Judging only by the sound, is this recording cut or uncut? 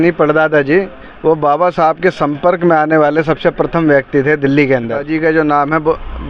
cut